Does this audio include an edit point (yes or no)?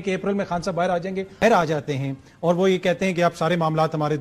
yes